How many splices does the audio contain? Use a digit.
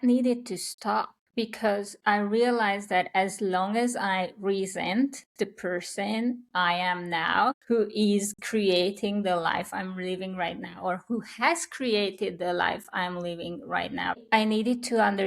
3